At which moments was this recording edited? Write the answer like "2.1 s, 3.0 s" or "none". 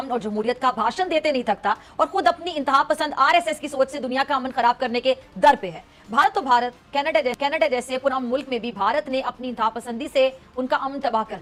none

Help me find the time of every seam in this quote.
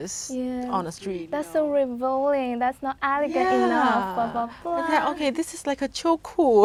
none

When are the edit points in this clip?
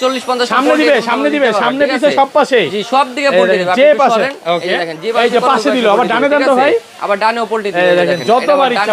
none

